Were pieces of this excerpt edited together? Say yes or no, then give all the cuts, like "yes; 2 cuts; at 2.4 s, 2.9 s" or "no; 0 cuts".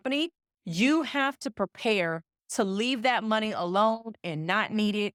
no; 0 cuts